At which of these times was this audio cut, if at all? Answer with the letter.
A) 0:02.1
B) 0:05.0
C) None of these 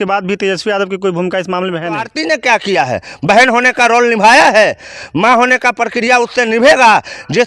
A